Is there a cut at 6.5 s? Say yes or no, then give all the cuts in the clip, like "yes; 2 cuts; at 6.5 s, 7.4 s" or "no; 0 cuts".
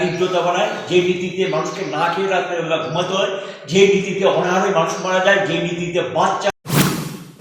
yes; 1 cut; at 6.5 s